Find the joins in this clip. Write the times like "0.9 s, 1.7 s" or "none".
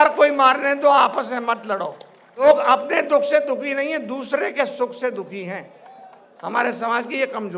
2.4 s